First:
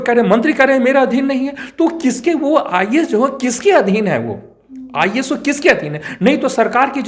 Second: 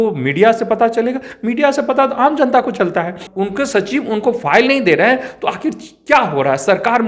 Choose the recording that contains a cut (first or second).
second